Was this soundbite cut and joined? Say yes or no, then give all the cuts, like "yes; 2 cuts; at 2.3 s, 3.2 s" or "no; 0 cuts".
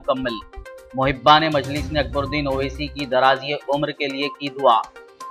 no; 0 cuts